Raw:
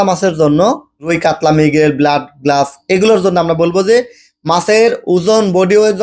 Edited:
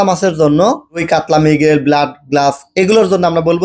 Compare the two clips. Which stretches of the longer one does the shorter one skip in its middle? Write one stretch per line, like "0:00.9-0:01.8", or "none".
0:00.9-0:01.0